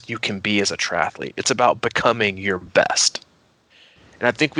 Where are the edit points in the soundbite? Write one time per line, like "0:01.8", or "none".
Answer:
none